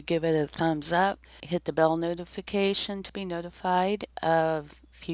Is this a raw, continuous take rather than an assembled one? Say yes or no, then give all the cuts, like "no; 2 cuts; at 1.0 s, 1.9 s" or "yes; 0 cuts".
no; 1 cut; at 1.3 s